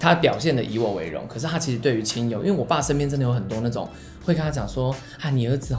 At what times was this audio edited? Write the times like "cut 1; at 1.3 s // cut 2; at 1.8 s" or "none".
none